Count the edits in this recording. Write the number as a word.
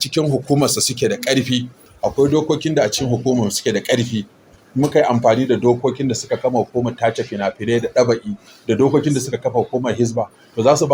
zero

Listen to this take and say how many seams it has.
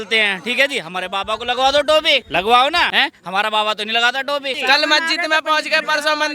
three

